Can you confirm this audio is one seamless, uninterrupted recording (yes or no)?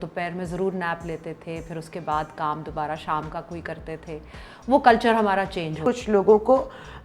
no